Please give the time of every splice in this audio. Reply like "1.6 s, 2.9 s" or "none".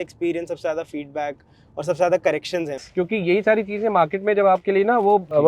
2.8 s